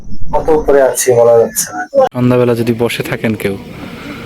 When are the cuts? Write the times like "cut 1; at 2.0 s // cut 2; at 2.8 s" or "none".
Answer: cut 1; at 2.1 s